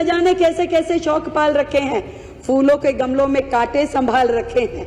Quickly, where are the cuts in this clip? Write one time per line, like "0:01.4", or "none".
none